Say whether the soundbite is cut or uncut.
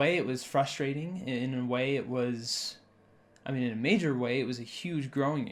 uncut